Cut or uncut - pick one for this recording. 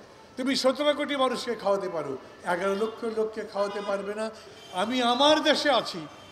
cut